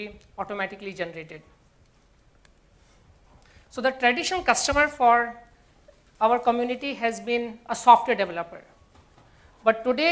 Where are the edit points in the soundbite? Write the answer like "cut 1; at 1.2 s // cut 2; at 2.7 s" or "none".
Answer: none